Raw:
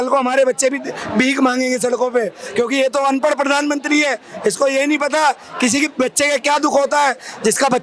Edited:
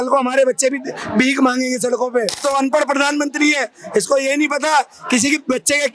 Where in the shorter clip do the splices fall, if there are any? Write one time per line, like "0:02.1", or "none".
0:02.4